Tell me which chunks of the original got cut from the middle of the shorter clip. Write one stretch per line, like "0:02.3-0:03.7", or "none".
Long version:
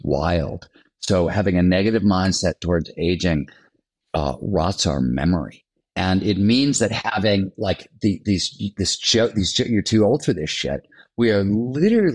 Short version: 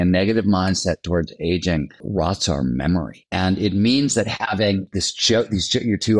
0:03.6-0:04.4
0:05.6-0:05.8
0:07.5-0:08.7